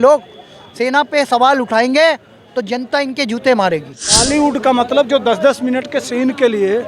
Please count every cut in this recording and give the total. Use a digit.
1